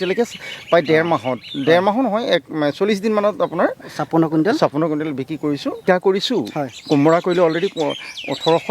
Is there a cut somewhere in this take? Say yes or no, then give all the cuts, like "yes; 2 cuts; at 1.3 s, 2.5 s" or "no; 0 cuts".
yes; 1 cut; at 5.8 s